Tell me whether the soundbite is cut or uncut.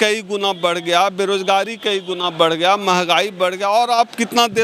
uncut